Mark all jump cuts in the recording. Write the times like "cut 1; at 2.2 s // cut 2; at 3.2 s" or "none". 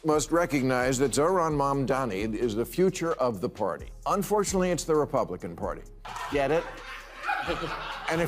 cut 1; at 5.9 s